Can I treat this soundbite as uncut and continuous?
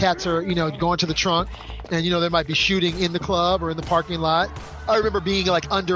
yes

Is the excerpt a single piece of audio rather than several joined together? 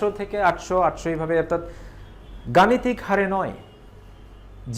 yes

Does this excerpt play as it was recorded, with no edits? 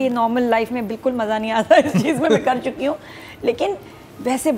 yes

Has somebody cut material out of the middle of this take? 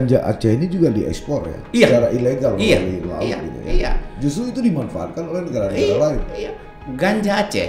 no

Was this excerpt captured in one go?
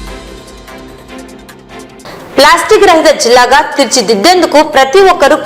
no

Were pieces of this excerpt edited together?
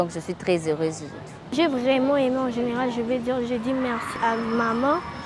yes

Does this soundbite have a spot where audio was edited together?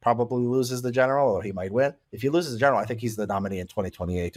no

